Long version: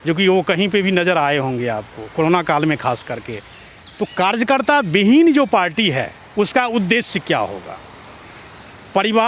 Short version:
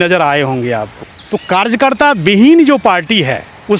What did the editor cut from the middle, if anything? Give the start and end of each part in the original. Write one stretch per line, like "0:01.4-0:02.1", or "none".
0:02.0-0:03.7